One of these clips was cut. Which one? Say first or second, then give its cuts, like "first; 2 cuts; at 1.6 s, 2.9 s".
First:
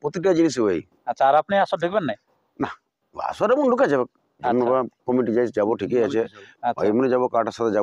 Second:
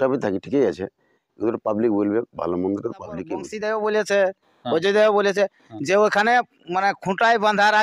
second; 1 cut; at 3.4 s